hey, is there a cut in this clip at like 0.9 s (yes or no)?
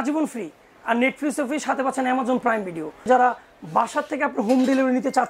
no